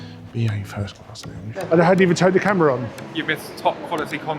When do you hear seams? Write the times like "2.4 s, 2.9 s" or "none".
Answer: 1.5 s